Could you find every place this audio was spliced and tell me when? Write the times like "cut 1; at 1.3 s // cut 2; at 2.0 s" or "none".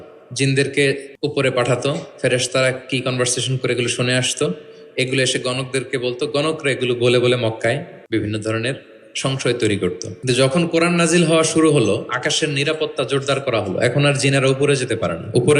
cut 1; at 1.1 s // cut 2; at 7.9 s // cut 3; at 10.1 s